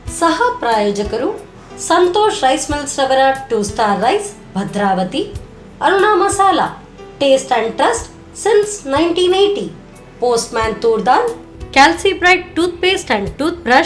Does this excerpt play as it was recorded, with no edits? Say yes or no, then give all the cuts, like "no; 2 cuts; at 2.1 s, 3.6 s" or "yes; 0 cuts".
yes; 0 cuts